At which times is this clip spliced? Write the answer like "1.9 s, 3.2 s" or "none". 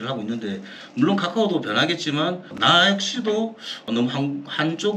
none